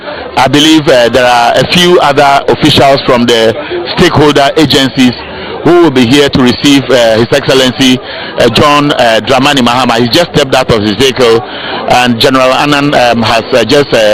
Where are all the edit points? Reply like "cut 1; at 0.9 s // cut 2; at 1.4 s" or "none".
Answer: none

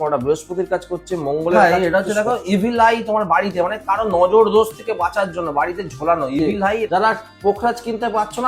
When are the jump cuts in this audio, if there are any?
cut 1; at 1.6 s // cut 2; at 6.9 s

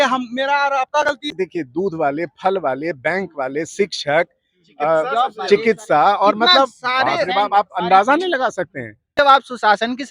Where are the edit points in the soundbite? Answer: cut 1; at 1.3 s // cut 2; at 9.0 s

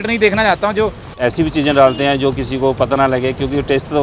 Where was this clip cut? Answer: cut 1; at 1.0 s

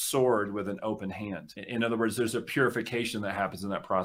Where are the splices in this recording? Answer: cut 1; at 1.6 s

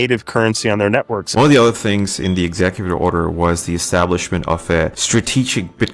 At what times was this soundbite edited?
cut 1; at 1.3 s // cut 2; at 5.0 s

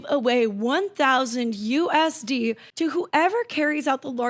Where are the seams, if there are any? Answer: cut 1; at 2.7 s

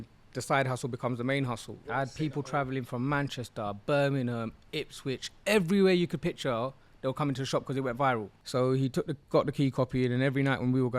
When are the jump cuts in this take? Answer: cut 1; at 2.1 s // cut 2; at 8.4 s

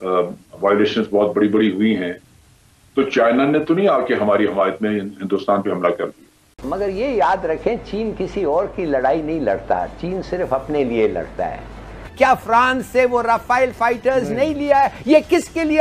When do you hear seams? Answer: cut 1; at 6.5 s // cut 2; at 12.0 s

